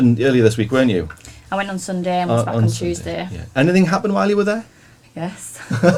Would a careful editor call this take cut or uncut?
uncut